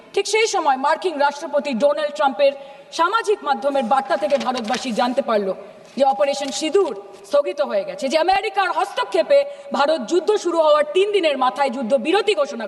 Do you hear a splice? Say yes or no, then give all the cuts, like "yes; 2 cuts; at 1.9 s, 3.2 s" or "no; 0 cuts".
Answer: no; 0 cuts